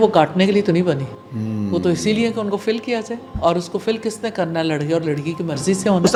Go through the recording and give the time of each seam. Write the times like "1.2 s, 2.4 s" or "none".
none